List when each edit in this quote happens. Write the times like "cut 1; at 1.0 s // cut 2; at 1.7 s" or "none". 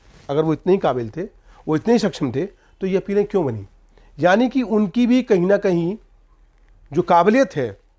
none